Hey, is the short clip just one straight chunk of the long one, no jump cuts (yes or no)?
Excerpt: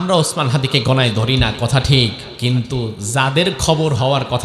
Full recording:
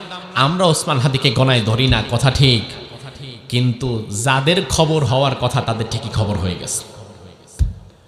no